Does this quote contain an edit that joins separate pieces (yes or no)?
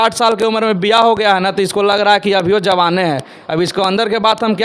no